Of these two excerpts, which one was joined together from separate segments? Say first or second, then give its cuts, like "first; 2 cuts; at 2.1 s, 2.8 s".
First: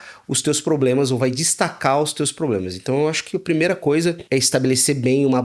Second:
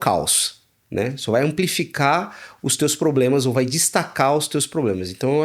first; 1 cut; at 4.2 s